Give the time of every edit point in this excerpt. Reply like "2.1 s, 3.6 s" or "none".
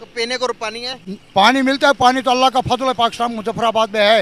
none